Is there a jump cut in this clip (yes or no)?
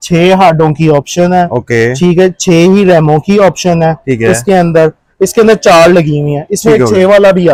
no